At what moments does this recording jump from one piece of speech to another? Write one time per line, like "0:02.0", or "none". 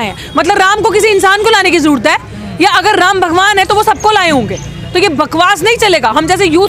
none